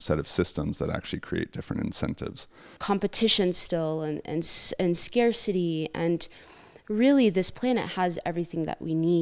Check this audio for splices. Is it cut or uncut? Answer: cut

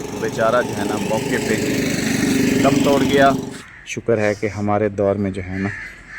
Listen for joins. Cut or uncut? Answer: cut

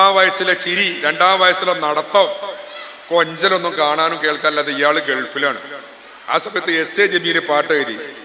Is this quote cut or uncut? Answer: uncut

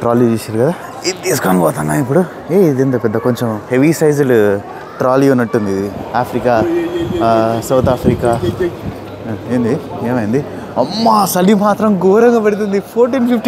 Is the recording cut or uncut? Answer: cut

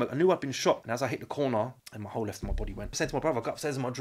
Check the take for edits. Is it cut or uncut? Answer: cut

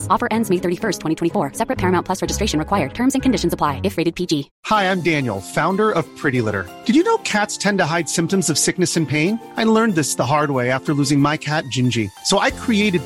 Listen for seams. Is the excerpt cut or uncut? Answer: cut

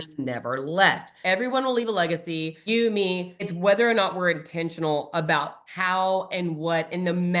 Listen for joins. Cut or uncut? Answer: cut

